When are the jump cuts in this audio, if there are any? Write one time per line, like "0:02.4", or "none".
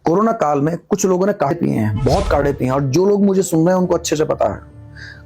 0:01.5